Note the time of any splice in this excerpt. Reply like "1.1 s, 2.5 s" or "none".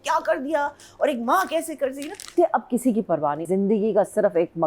2.3 s, 3.4 s